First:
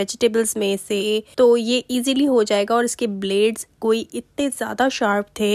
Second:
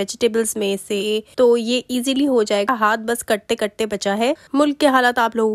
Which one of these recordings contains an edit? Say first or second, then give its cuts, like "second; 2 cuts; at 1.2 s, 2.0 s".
second; 2 cuts; at 2.7 s, 4.4 s